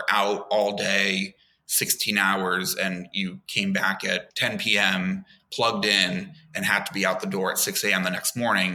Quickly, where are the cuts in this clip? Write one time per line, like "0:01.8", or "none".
0:04.3